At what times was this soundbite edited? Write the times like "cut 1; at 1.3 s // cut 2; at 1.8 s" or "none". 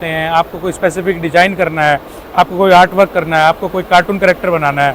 none